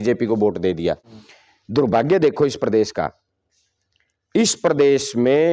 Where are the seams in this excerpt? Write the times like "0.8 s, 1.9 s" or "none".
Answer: none